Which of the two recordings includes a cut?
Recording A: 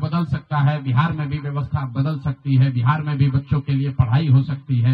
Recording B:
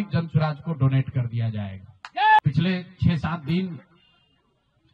B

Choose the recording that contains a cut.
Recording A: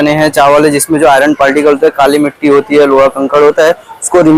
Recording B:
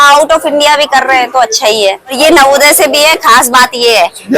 B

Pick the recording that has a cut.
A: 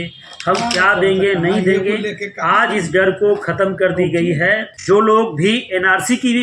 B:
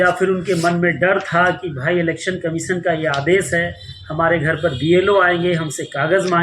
A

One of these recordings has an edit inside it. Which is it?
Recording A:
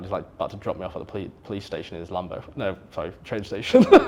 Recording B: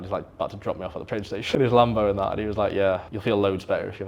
B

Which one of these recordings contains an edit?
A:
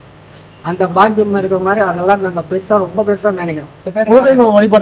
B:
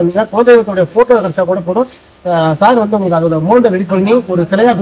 A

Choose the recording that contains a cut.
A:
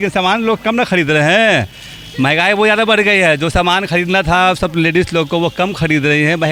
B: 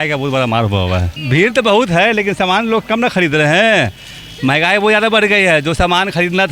B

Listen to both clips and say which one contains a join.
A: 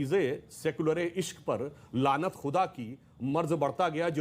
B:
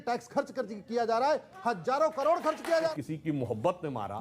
B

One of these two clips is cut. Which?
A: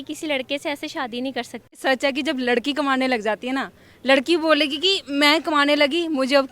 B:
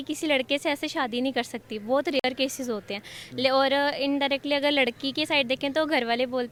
A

